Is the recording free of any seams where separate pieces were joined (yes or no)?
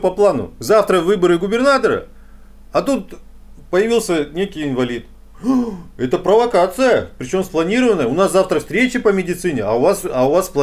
yes